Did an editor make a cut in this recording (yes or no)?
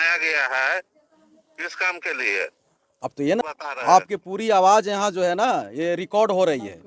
yes